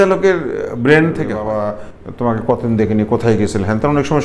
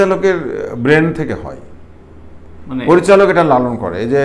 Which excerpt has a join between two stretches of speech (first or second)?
first